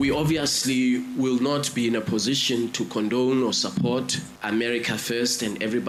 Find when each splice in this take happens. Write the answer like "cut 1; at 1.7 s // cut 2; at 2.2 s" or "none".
none